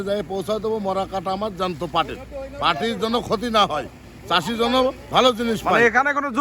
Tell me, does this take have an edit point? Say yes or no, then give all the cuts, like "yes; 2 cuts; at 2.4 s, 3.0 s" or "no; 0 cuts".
no; 0 cuts